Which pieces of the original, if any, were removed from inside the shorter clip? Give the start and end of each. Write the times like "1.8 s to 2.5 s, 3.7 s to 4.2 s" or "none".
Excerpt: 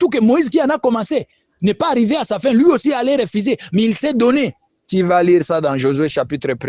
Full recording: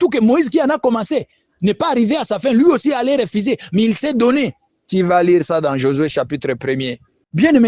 none